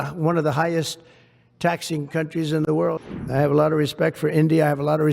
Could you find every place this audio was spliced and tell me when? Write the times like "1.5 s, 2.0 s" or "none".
3.0 s

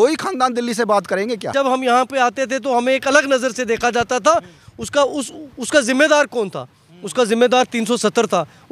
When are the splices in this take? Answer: 1.5 s

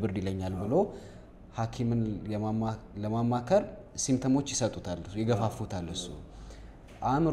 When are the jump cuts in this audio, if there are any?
none

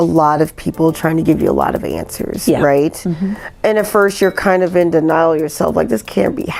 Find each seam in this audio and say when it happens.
none

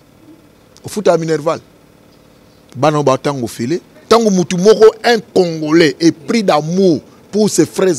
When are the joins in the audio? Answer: 3.9 s

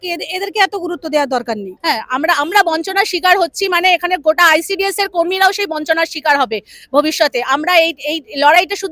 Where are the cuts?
1.7 s

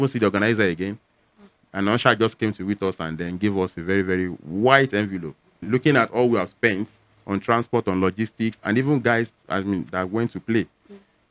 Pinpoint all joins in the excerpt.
5.6 s

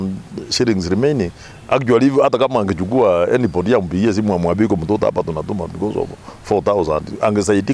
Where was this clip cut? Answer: none

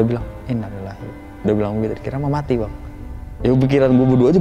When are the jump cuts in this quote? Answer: none

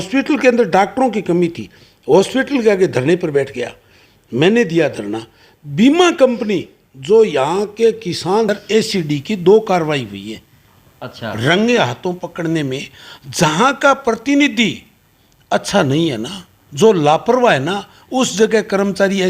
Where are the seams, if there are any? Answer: 8.5 s

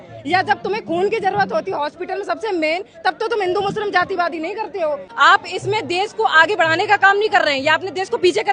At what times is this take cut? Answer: 5.1 s

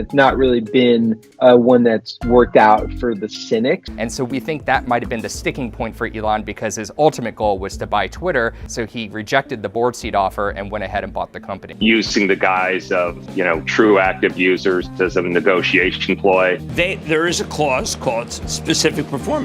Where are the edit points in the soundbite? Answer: 3.9 s, 11.7 s, 16.7 s

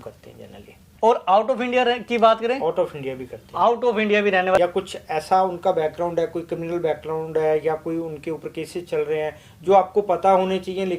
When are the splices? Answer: 0.9 s, 4.5 s

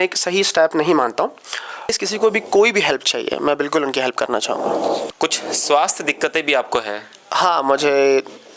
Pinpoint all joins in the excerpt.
1.9 s, 5.1 s

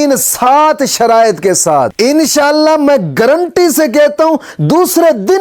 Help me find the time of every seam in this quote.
none

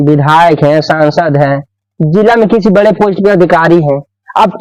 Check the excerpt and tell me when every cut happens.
none

